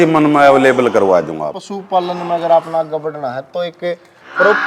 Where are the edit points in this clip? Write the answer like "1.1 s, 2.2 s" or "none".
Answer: 1.6 s